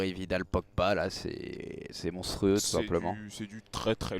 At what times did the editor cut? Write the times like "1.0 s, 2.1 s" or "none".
1.0 s